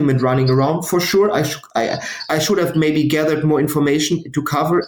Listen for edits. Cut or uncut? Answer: cut